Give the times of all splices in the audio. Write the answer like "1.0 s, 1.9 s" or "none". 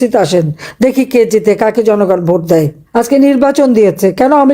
2.8 s